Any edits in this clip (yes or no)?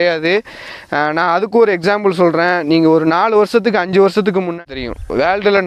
yes